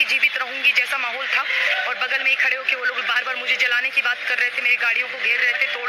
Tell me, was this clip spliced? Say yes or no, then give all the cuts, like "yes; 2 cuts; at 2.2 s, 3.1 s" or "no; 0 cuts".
no; 0 cuts